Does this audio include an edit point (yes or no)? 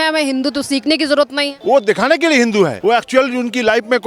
yes